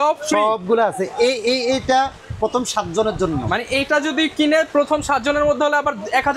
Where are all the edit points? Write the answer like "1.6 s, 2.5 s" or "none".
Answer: none